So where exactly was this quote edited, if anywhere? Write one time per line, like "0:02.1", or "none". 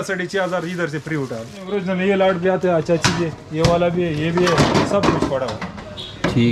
0:01.7